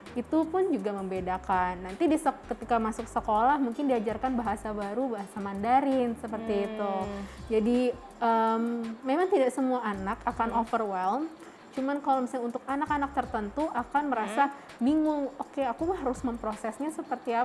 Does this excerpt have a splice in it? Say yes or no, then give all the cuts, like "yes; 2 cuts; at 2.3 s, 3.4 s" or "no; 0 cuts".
no; 0 cuts